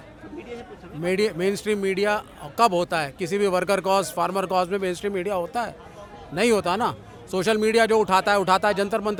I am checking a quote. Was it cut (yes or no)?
no